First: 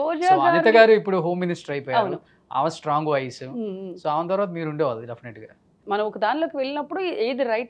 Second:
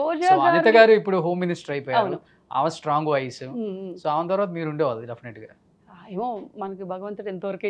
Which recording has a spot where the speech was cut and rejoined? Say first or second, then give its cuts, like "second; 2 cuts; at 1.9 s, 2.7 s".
first; 1 cut; at 5.7 s